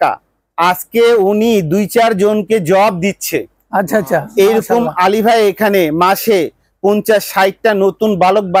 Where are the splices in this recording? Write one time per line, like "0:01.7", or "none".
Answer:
none